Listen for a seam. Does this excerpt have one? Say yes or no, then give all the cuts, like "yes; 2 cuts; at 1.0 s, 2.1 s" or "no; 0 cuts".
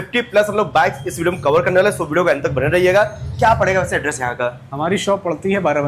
no; 0 cuts